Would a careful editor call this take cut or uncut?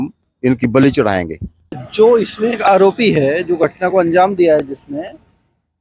cut